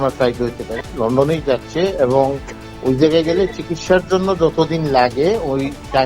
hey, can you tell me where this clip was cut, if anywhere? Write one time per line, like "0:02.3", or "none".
0:00.9